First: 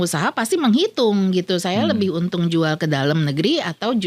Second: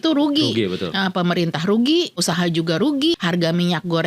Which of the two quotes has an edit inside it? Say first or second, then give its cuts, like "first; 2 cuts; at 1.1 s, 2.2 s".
second; 2 cuts; at 2.2 s, 3.2 s